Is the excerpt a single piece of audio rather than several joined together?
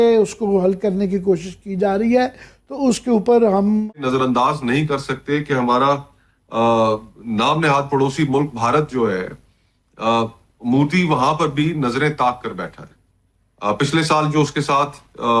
no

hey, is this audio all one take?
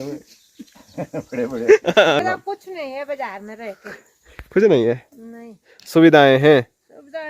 no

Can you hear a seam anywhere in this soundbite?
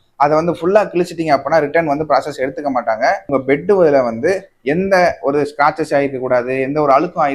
yes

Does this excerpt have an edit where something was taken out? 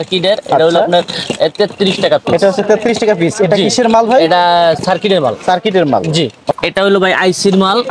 no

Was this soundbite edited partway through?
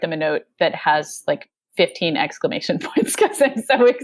no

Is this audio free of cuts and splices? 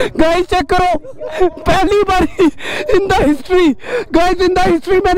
yes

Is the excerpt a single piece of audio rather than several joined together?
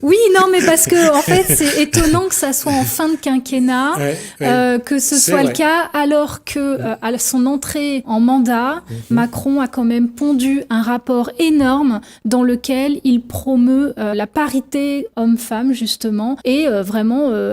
yes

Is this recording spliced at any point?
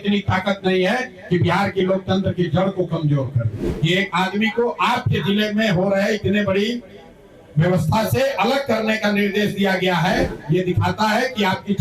yes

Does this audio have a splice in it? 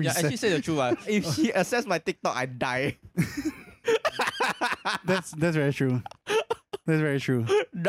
no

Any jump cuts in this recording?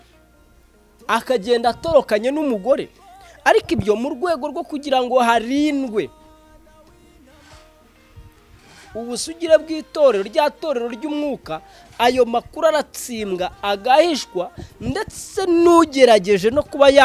no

